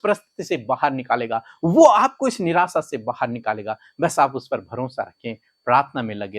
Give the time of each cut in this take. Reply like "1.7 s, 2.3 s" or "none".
none